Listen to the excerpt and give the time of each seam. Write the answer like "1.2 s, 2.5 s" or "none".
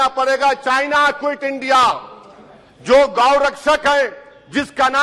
none